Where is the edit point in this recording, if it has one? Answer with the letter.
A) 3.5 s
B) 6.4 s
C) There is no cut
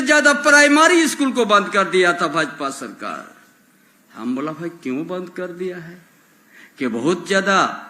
C